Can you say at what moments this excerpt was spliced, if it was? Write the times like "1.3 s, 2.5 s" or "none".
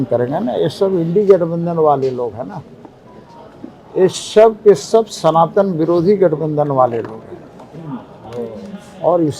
none